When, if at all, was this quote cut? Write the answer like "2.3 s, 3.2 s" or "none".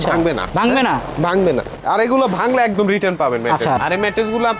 1.7 s, 3.8 s